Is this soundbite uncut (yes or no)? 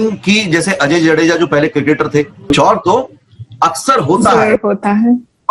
no